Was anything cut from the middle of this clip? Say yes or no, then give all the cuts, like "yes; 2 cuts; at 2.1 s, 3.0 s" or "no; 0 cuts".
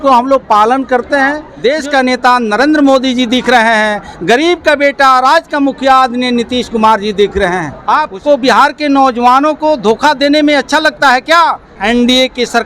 yes; 3 cuts; at 1.5 s, 7.7 s, 11.7 s